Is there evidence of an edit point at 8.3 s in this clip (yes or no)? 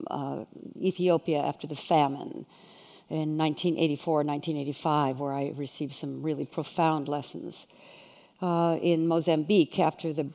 no